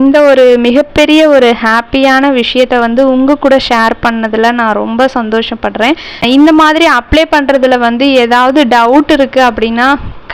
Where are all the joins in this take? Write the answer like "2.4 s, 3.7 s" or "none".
6.2 s